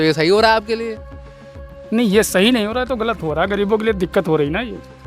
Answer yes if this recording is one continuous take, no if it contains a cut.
yes